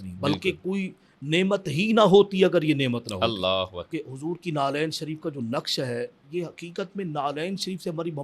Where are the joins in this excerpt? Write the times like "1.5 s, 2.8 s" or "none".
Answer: 3.9 s